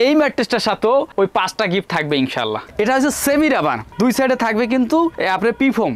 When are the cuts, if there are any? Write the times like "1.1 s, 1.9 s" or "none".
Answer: 2.7 s